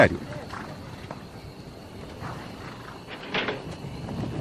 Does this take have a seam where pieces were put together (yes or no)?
no